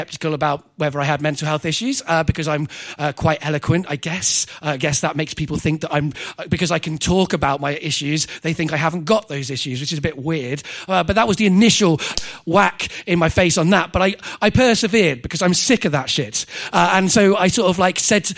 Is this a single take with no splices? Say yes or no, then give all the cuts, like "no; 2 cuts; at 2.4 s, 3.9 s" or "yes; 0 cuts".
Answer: yes; 0 cuts